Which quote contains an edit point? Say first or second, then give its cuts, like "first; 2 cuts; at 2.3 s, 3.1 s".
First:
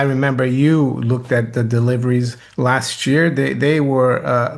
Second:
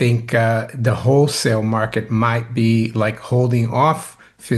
first; 1 cut; at 2.4 s